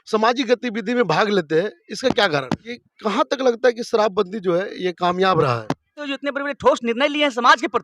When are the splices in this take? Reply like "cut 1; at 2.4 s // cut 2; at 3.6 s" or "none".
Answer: cut 1; at 2.7 s // cut 2; at 6.1 s